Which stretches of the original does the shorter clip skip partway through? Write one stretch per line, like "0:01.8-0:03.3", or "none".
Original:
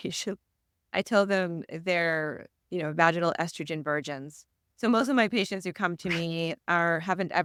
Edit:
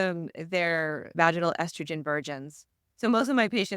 0:02.4-0:02.9